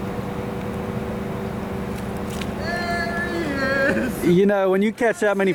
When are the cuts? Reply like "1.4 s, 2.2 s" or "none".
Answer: none